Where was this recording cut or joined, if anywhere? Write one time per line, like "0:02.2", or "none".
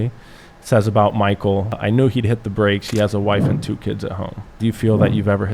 0:01.8
0:04.6